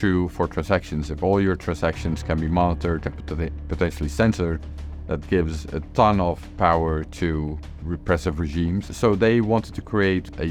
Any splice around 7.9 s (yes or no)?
no